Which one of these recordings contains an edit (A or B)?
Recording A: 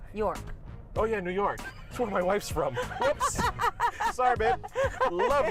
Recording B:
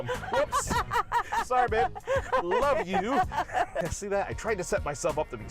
B